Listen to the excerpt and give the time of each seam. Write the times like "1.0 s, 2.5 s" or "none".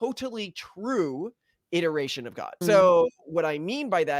2.6 s